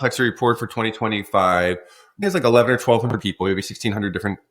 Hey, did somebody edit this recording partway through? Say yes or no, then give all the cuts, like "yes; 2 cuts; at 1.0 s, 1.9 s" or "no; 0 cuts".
yes; 1 cut; at 2.2 s